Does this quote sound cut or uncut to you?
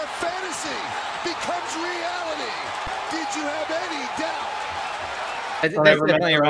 uncut